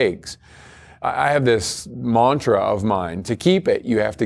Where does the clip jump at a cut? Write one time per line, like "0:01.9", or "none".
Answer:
0:01.5
0:03.2

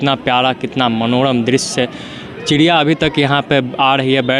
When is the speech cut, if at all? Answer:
none

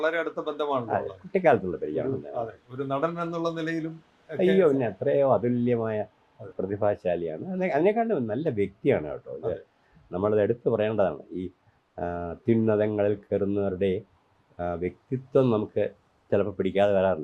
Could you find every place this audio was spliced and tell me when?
none

